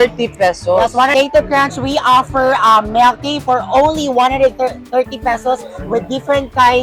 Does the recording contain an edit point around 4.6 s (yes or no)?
no